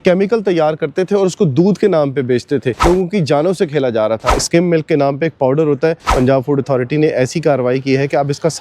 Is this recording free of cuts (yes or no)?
no